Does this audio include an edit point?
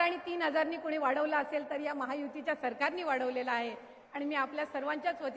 no; 0 cuts

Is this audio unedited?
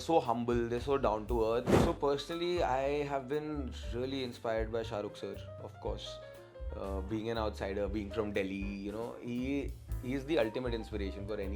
no; 1 cut; at 1.8 s

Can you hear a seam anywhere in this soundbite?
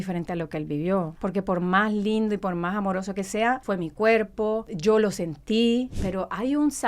yes; 4 cuts; at 1.1 s, 3.6 s, 4.7 s, 5.9 s

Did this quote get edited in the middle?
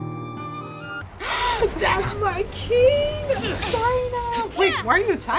yes; 1 cut; at 1.0 s

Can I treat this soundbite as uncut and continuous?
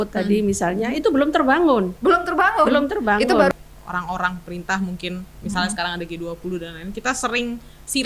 no; 1 cut; at 3.5 s

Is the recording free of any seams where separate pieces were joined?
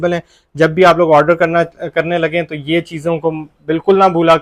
yes; 0 cuts

